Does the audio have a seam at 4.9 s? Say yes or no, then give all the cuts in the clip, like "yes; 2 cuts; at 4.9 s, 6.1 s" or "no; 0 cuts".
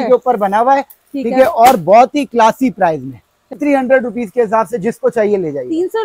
no; 1 cut; at 3.6 s